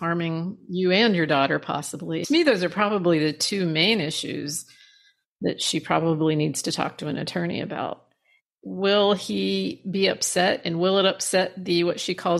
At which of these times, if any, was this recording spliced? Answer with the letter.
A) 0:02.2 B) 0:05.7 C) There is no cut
A